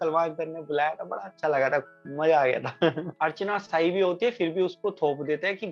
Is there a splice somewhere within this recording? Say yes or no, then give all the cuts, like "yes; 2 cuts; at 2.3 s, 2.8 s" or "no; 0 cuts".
yes; 1 cut; at 3.1 s